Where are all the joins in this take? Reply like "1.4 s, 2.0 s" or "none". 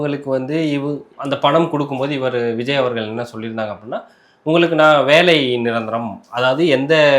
1.1 s